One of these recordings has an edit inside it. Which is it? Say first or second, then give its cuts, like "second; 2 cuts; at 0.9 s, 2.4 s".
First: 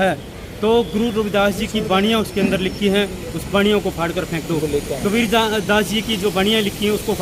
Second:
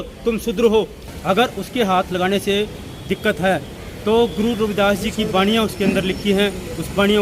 second; 1 cut; at 1.1 s